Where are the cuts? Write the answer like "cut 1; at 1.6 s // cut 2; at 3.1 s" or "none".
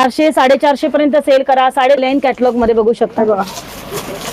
cut 1; at 2.0 s